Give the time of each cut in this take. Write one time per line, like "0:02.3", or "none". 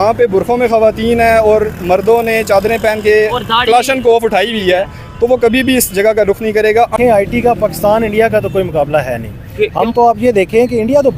0:06.9